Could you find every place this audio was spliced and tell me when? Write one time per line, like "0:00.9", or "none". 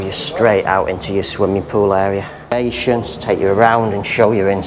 0:02.5